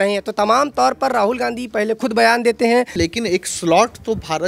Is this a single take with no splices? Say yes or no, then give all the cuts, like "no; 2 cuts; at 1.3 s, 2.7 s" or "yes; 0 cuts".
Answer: no; 1 cut; at 2.9 s